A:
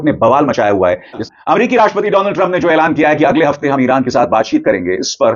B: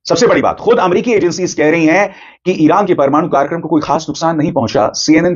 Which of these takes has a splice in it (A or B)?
A